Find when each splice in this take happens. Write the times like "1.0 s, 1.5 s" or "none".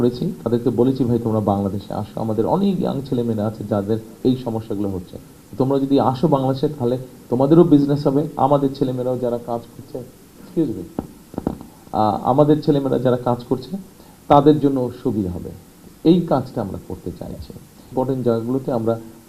17.9 s